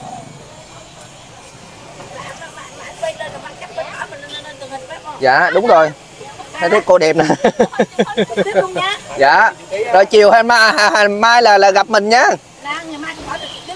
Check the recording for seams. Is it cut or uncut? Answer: uncut